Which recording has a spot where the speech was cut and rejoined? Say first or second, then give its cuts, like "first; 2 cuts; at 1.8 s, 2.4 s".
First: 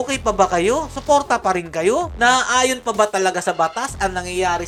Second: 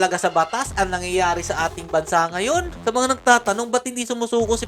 second; 1 cut; at 2.7 s